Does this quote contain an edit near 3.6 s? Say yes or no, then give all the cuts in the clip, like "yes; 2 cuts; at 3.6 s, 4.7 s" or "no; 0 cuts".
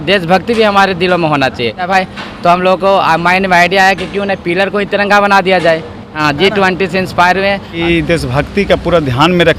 no; 3 cuts; at 1.9 s, 6.2 s, 7.8 s